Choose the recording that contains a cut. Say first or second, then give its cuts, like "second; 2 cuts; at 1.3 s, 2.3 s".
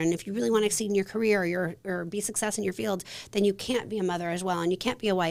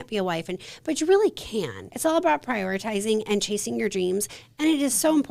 second; 1 cut; at 1.9 s